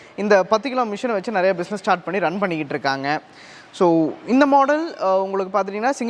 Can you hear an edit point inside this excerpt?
no; 0 cuts

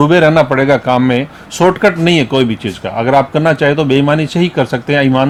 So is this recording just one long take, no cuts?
yes; 0 cuts

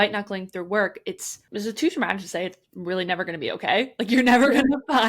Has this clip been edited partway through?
yes; 1 cut; at 1.3 s

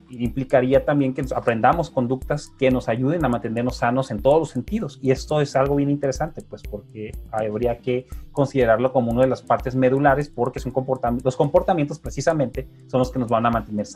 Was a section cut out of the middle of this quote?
no; 0 cuts

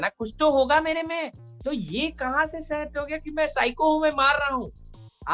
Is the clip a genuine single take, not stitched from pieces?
yes; 0 cuts

